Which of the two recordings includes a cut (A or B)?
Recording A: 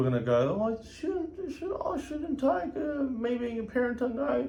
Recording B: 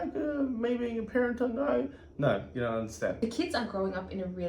B